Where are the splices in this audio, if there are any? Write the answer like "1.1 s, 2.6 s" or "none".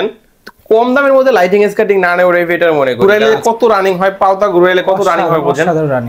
3.0 s